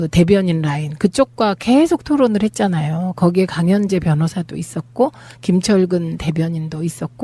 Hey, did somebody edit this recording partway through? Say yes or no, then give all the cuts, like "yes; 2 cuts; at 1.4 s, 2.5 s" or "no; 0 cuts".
no; 0 cuts